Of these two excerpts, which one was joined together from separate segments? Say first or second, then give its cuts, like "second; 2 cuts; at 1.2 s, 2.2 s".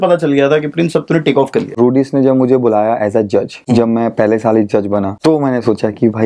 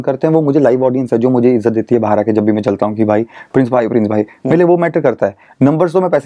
first; 3 cuts; at 1.7 s, 3.5 s, 5.1 s